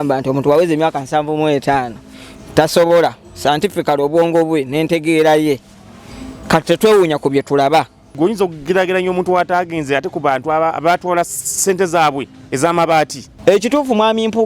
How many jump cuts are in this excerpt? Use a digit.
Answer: 2